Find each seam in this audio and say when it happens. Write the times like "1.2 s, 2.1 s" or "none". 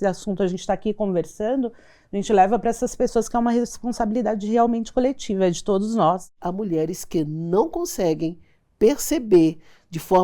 6.4 s